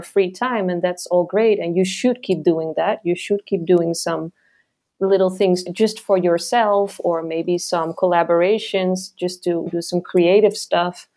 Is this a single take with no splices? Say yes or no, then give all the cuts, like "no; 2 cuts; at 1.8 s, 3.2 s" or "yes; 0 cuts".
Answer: no; 2 cuts; at 5.7 s, 9.7 s